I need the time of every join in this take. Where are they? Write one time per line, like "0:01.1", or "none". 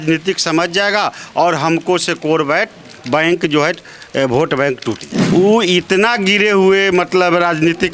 0:05.1